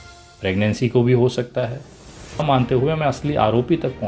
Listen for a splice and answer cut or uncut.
cut